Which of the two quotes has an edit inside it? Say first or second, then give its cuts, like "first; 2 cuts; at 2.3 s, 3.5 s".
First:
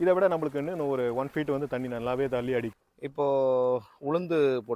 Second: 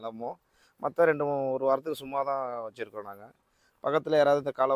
first; 1 cut; at 2.7 s